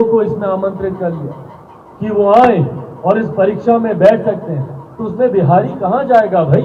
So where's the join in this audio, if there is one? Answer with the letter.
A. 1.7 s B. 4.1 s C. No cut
C